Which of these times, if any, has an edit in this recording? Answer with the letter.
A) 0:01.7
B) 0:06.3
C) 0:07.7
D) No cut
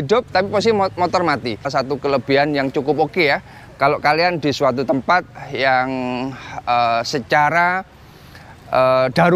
A